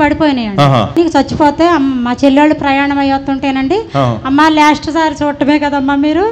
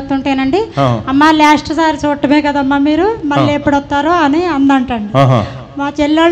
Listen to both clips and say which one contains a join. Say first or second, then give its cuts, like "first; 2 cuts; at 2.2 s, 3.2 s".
first; 1 cut; at 1.0 s